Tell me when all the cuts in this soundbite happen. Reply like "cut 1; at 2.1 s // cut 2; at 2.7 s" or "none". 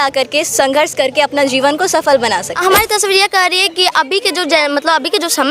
cut 1; at 2.5 s